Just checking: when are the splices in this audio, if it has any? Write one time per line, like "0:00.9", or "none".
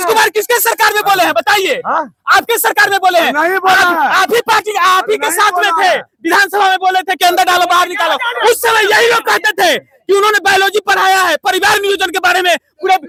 none